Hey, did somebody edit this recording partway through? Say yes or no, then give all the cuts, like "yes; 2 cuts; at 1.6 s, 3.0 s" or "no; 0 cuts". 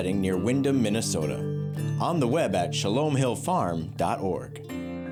no; 0 cuts